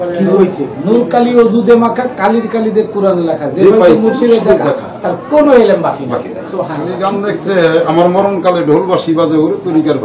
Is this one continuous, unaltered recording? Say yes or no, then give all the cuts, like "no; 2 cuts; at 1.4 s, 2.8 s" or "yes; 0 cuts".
no; 1 cut; at 7.1 s